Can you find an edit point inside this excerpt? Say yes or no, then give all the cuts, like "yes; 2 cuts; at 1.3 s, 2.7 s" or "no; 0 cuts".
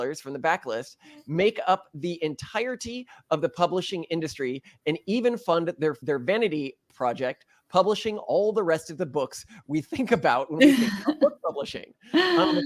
yes; 1 cut; at 6.0 s